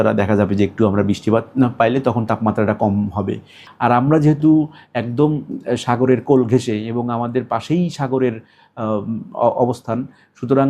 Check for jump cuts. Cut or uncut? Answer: cut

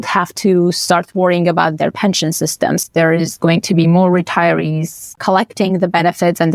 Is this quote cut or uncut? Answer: cut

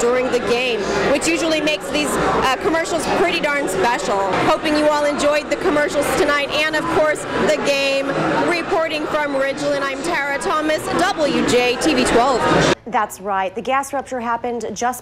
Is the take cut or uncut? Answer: cut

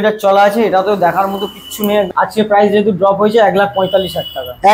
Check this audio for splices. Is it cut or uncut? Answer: cut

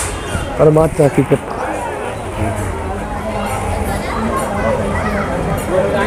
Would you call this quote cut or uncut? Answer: uncut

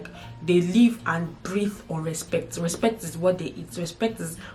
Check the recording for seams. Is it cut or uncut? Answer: uncut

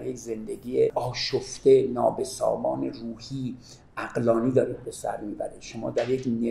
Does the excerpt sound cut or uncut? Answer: cut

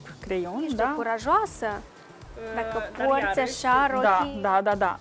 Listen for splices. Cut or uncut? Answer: uncut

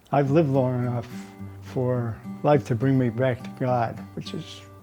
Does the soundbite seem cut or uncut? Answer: cut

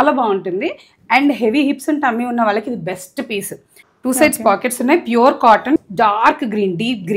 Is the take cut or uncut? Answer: cut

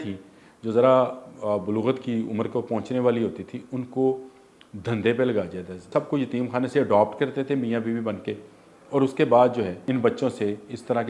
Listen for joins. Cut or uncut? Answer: cut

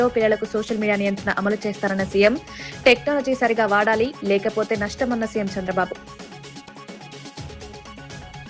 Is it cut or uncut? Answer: uncut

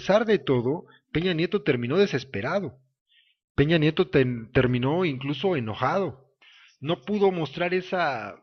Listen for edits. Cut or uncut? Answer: cut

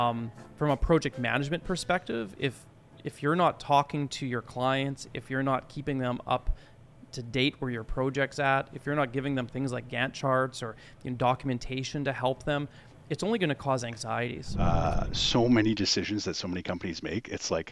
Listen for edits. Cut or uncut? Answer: cut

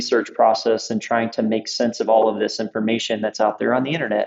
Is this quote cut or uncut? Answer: uncut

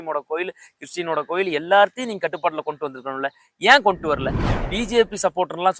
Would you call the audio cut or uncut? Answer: cut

